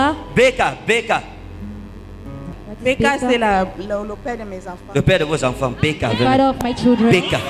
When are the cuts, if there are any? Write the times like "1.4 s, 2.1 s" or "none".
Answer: none